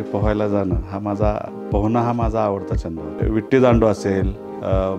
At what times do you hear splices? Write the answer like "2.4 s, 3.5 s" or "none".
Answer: 3.2 s